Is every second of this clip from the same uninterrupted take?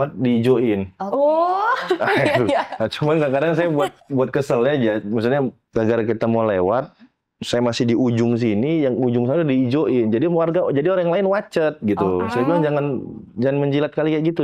no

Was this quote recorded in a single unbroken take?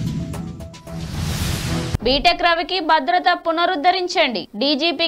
no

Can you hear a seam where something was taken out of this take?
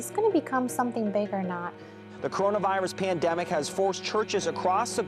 yes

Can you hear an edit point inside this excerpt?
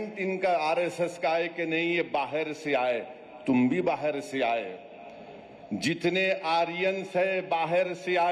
no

